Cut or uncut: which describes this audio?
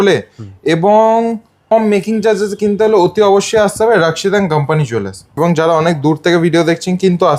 cut